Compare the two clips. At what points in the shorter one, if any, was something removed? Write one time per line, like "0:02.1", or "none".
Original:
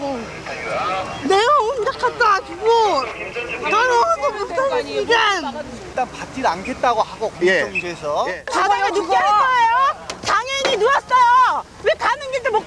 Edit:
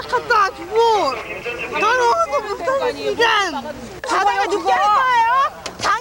0:03.9